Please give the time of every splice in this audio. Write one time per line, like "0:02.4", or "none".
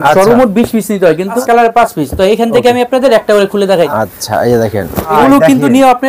0:01.4
0:03.9
0:05.1